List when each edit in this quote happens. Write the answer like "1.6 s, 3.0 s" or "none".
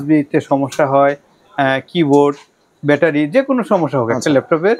none